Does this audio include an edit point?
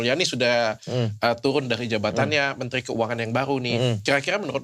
no; 0 cuts

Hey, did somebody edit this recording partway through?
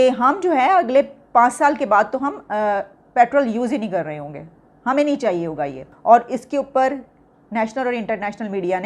yes; 1 cut; at 5.9 s

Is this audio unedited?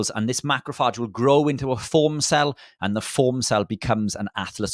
yes; 0 cuts

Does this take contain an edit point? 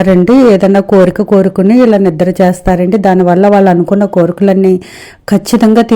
no; 0 cuts

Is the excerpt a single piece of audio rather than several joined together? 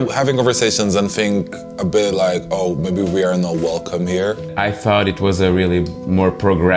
no; 1 cut; at 4.5 s

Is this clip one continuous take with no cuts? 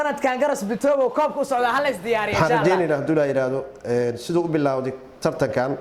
no; 1 cut; at 2.3 s

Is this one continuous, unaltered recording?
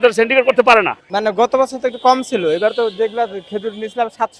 no; 1 cut; at 1.0 s

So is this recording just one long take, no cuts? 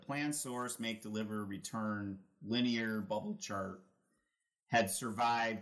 yes; 0 cuts

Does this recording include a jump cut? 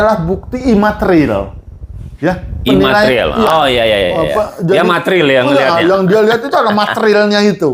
no; 0 cuts

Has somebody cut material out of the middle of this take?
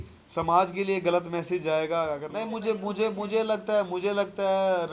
yes; 1 cut; at 2.2 s

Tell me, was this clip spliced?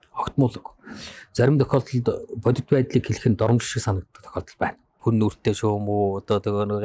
yes; 1 cut; at 4.9 s

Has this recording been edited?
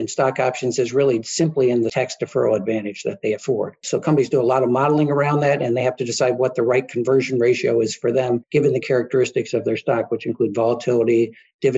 yes; 3 cuts; at 1.9 s, 3.8 s, 8.4 s

